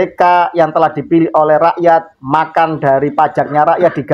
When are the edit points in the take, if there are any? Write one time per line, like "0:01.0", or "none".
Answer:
none